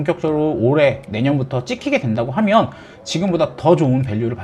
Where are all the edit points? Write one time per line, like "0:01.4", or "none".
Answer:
none